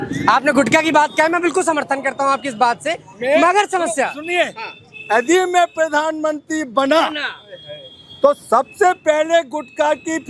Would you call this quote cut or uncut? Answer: uncut